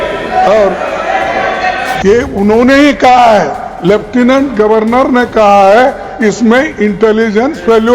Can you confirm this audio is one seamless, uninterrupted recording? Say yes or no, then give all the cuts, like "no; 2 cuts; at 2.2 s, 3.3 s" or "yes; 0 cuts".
no; 1 cut; at 1.9 s